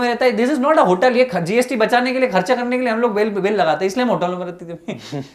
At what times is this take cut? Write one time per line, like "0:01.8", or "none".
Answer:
none